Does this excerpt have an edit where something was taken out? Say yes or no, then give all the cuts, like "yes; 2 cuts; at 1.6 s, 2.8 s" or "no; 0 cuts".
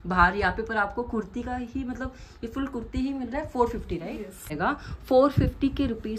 yes; 1 cut; at 4.5 s